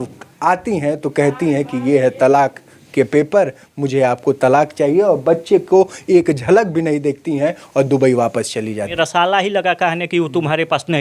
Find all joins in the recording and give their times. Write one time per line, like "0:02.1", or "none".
0:08.9